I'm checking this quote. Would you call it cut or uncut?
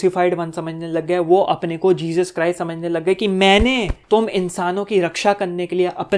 uncut